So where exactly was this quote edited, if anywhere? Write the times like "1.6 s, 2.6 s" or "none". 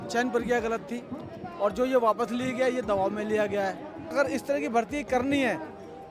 4.1 s